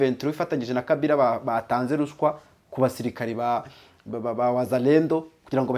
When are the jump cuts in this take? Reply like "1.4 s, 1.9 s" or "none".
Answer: none